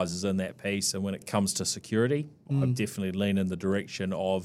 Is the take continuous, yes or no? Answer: no